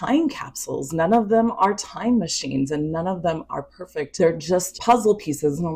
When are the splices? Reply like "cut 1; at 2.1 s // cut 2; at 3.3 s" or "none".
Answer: none